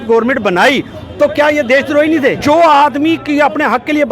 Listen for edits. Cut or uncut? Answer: cut